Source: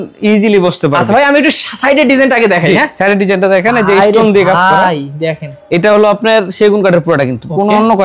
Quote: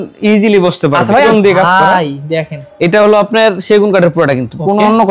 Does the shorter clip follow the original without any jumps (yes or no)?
no